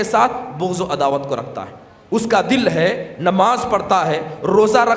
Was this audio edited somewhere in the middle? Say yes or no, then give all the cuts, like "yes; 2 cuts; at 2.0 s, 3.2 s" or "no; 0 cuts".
no; 0 cuts